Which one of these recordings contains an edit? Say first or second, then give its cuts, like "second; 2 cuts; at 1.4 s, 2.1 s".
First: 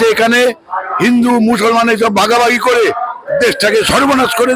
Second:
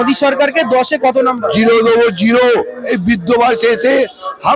second; 1 cut; at 2.8 s